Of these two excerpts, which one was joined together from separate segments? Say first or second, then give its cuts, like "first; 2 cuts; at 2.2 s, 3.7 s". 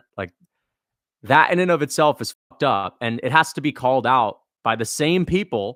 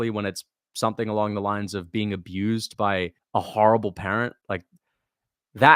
second; 1 cut; at 3.2 s